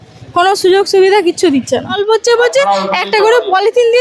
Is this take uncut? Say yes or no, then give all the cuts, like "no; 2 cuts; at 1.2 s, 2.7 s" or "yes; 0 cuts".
no; 1 cut; at 2.0 s